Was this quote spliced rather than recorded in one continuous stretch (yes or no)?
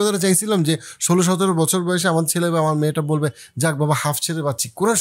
no